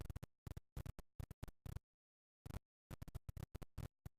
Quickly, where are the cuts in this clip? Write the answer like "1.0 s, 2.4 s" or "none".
none